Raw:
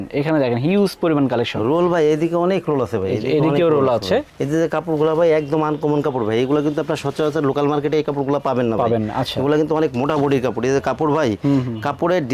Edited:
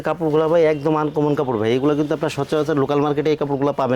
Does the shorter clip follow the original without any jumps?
yes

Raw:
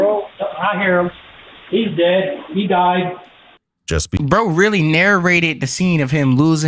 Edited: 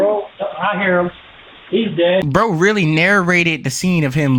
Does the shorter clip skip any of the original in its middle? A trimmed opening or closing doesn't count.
yes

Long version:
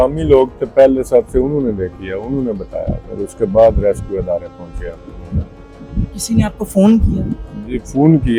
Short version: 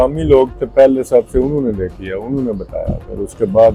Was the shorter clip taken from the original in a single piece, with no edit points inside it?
yes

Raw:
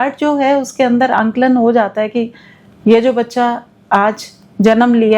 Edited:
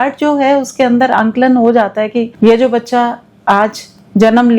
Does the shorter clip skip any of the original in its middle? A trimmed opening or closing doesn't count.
yes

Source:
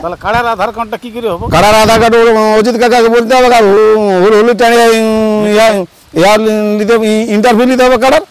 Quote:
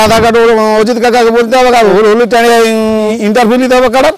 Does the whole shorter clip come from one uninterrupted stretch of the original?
no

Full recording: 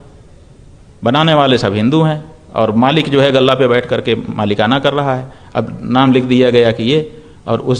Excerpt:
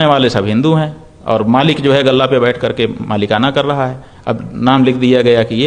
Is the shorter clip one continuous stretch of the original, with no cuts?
yes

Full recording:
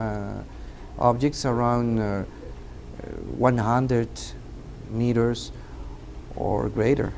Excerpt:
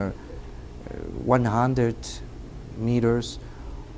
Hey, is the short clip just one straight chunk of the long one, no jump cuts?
yes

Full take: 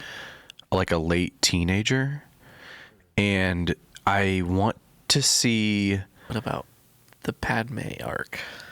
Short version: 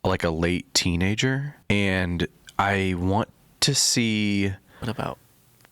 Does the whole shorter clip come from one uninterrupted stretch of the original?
no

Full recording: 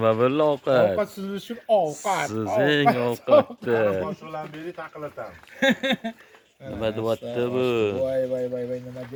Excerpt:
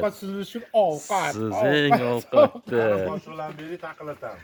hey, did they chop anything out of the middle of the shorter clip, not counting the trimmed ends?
no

